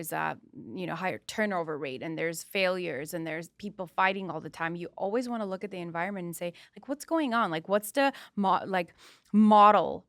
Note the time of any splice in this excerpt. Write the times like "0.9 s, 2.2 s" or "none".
none